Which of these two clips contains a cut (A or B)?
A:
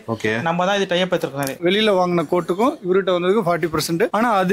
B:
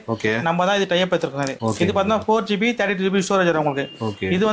A